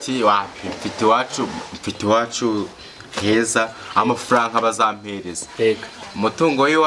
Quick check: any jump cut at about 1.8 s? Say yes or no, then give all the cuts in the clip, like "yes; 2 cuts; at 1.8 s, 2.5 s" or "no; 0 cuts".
no; 0 cuts